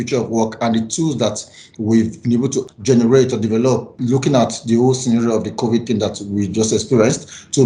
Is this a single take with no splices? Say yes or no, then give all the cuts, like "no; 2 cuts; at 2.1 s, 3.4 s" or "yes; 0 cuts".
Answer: no; 2 cuts; at 2.7 s, 3.9 s